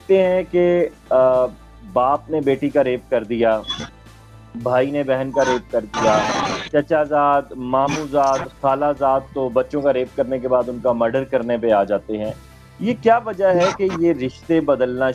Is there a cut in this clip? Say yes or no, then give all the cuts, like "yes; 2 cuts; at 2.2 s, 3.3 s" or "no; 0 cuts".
no; 0 cuts